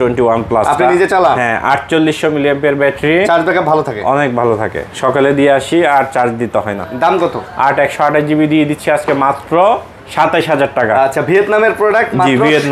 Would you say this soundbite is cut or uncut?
uncut